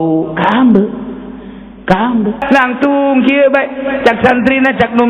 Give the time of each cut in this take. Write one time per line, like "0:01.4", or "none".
0:02.4